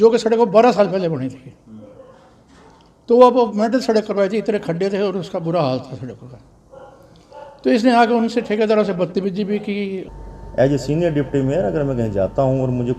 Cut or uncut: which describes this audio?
cut